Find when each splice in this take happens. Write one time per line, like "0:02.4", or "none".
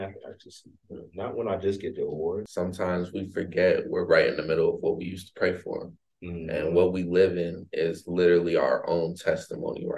0:02.5